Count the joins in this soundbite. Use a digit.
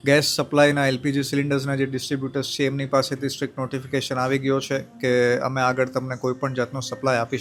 0